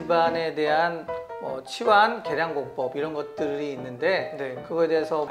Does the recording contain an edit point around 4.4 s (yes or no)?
no